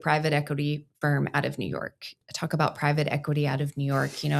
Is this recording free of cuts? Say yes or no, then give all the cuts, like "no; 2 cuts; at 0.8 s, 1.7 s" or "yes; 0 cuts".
no; 1 cut; at 2.2 s